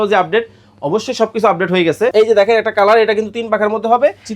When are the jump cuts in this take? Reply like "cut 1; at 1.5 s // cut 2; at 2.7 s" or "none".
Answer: cut 1; at 2.1 s